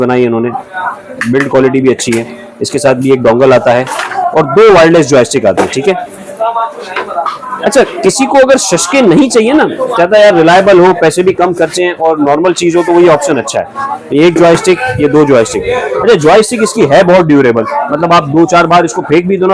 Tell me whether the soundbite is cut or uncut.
uncut